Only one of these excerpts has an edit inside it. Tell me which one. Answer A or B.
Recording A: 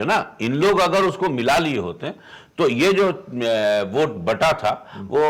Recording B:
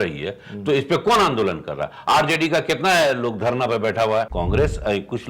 B